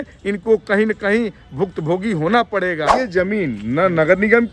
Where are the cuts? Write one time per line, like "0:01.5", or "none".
0:02.9